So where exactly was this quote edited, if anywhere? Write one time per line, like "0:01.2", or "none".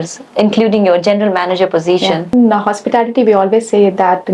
0:02.3